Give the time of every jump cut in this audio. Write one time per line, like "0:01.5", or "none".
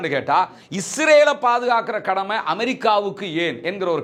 none